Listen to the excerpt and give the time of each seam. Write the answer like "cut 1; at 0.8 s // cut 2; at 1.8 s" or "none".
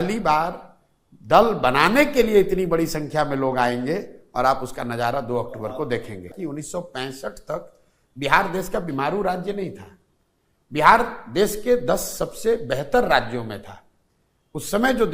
cut 1; at 6.3 s